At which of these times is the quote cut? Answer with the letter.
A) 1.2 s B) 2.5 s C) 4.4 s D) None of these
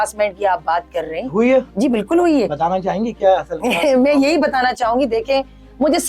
D